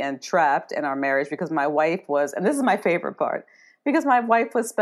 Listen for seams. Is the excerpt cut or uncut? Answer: uncut